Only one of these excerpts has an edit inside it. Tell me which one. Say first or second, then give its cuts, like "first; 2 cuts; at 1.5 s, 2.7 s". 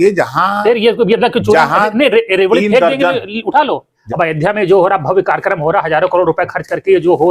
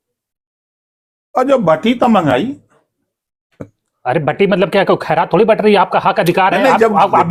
first; 1 cut; at 4.0 s